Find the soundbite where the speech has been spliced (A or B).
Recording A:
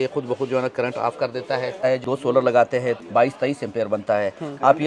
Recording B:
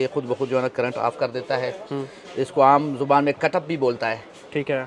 A